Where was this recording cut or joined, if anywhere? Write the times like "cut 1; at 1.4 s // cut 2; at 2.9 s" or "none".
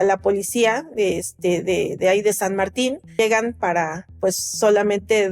cut 1; at 3.1 s